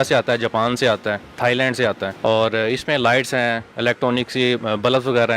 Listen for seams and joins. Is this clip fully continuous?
no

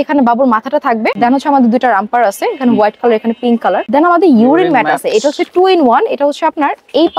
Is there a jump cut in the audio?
yes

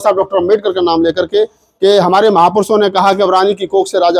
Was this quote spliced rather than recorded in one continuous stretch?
no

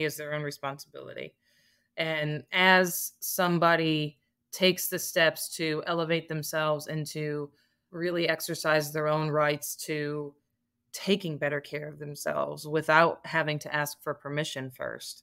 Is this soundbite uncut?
yes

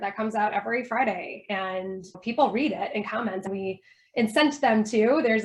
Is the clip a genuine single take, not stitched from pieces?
no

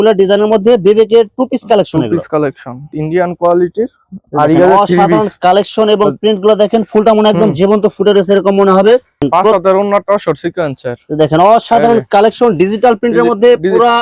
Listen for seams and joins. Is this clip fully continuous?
no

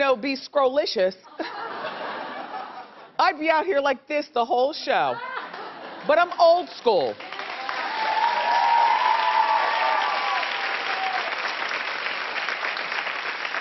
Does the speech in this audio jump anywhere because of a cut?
yes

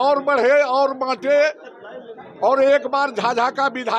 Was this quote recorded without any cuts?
yes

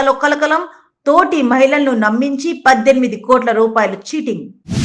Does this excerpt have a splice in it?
no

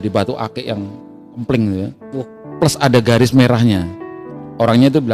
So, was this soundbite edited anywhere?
yes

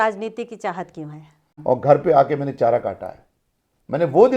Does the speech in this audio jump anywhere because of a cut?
yes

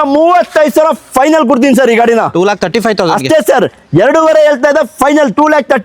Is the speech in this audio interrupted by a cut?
no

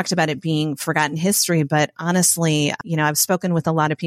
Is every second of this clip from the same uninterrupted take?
no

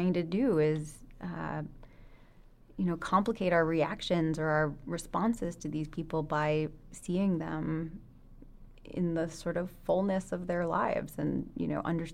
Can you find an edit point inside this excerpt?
no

